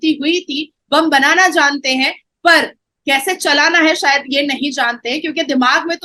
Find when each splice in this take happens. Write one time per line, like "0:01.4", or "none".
none